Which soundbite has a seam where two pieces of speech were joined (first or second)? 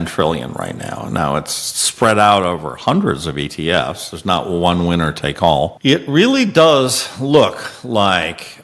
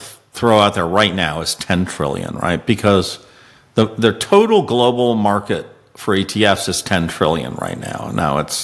first